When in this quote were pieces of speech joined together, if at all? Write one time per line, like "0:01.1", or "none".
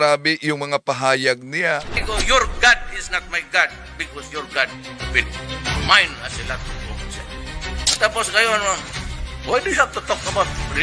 0:01.9

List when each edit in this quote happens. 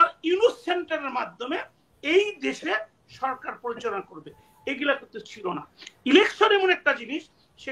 none

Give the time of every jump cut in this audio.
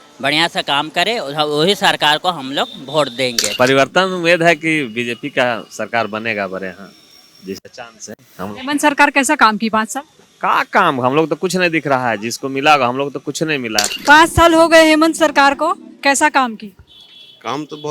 0:03.4
0:13.9

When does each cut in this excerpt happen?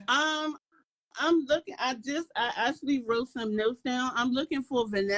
none

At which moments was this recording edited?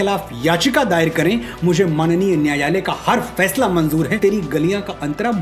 0:04.2

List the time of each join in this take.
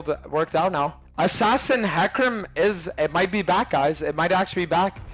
0:01.0

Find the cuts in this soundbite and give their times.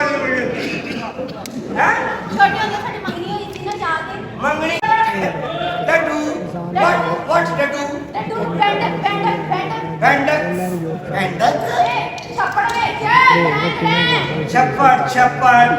0:04.8

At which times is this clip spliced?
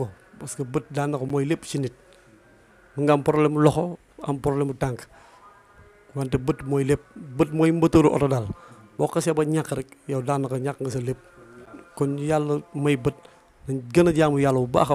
none

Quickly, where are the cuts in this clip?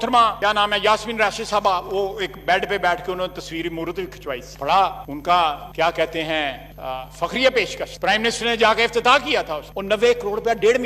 none

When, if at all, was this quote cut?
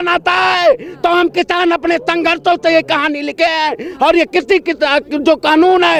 none

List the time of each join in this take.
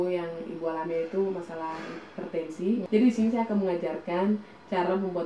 0:02.9

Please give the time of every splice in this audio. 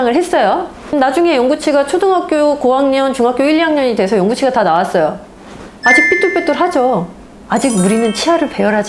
0:00.9

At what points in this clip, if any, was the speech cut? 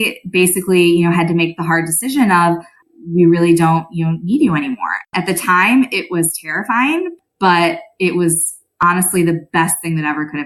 0:02.8
0:05.1
0:07.1

